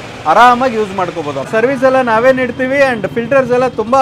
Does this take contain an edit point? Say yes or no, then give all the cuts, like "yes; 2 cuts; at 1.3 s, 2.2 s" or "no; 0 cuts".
yes; 1 cut; at 1.5 s